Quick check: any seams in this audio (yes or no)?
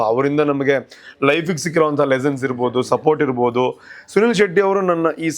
no